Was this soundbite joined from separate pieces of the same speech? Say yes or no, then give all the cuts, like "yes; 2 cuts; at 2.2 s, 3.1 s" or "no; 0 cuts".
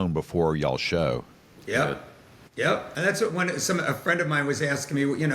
yes; 1 cut; at 2.9 s